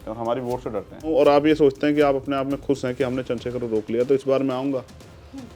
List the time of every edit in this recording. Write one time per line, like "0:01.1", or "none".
0:01.1